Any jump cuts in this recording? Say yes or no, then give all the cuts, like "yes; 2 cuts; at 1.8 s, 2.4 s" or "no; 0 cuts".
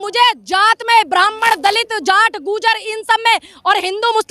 no; 0 cuts